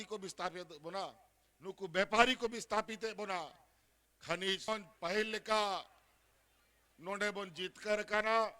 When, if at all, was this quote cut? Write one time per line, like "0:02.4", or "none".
0:04.7